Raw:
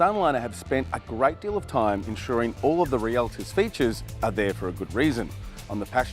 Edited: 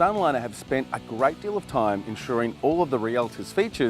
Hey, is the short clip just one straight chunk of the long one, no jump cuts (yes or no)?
yes